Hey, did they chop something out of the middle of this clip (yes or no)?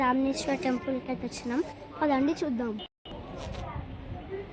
no